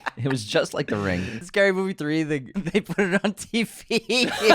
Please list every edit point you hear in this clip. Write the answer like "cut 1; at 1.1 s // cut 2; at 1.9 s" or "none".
cut 1; at 1.4 s // cut 2; at 2.5 s